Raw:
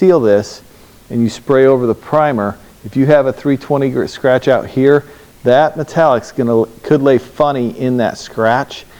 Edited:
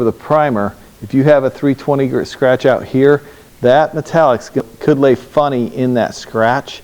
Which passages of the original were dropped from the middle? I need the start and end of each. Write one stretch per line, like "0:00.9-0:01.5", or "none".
0:06.5-0:06.7

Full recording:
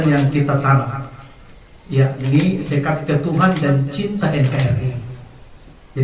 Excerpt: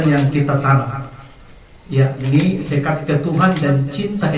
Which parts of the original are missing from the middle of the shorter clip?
none

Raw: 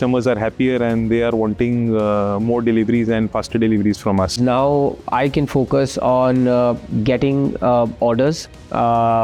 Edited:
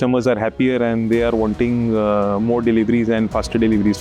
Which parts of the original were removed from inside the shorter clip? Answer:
none

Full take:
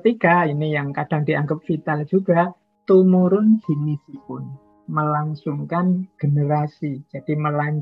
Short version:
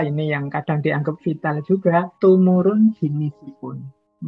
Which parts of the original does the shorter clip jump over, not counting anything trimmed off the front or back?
0:02.5-0:02.8

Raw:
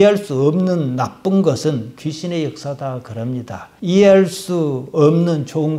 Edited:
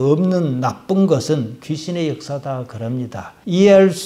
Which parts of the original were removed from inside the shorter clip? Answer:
none

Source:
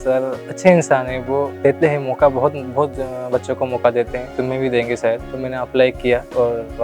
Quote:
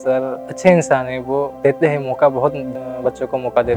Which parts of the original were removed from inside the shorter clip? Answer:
0:02.7-0:03.0

